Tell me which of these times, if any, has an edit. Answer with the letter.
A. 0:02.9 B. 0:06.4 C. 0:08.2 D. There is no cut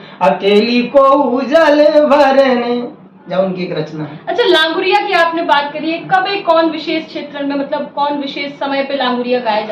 D